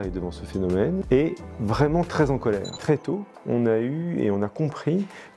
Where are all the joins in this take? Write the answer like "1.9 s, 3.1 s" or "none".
1.0 s, 2.7 s

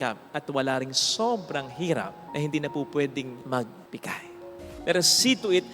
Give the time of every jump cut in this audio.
4.6 s

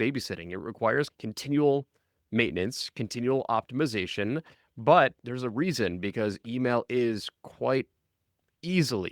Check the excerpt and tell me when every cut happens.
1.1 s

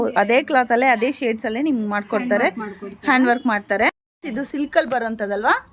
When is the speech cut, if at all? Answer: 4.1 s

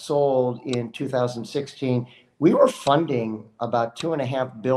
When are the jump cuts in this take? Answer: none

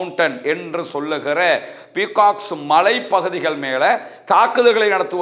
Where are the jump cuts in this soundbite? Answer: none

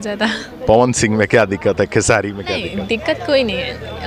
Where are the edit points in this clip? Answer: none

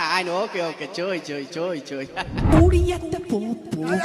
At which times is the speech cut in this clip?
2.5 s

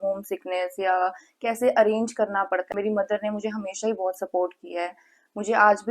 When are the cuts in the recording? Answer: 2.7 s

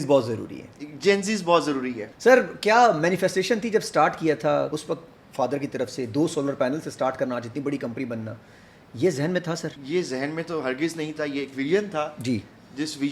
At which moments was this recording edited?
2.0 s, 4.7 s, 9.7 s

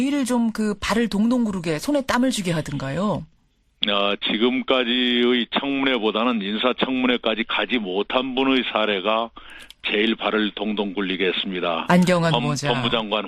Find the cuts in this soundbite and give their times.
none

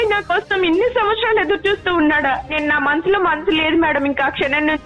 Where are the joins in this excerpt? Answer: 2.5 s

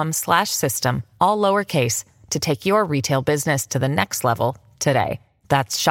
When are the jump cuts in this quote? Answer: none

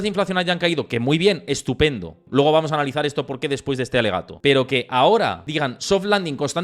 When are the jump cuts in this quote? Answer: 2.1 s, 4.3 s, 5.4 s

